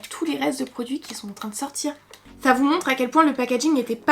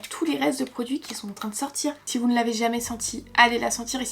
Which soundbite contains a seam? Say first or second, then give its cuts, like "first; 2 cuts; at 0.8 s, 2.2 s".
second; 1 cut; at 2.0 s